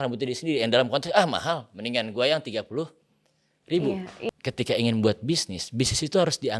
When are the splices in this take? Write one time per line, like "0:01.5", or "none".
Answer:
0:04.1